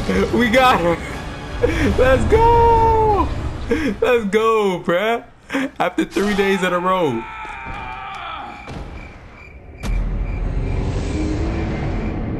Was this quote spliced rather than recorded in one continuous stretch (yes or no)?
no